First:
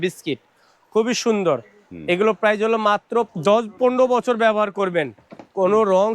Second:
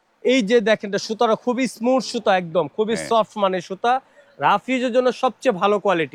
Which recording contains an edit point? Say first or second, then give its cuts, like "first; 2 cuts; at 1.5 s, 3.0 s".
first; 1 cut; at 3.3 s